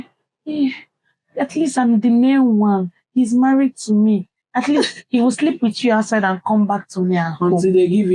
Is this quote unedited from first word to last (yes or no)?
yes